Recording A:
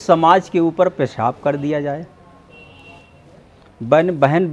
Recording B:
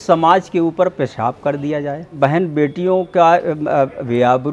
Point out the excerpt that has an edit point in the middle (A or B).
B